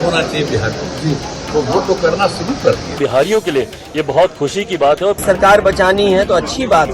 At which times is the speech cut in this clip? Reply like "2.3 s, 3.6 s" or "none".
3.0 s, 5.2 s